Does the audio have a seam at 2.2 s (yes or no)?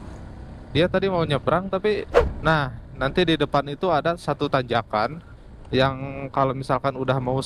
yes